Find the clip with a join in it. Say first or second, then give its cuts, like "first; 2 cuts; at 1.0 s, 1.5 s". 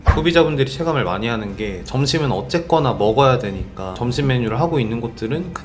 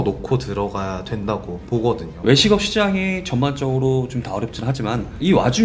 second; 1 cut; at 2.1 s